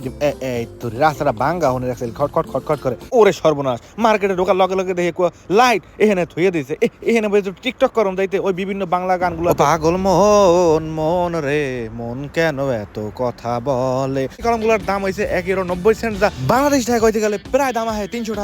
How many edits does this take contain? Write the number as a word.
two